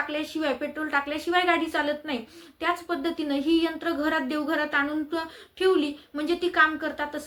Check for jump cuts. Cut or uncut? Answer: uncut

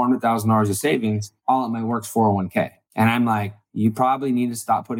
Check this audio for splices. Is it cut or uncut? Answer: cut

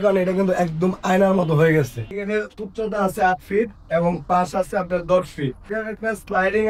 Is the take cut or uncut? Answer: cut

